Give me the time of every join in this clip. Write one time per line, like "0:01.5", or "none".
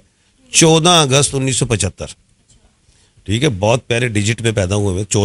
none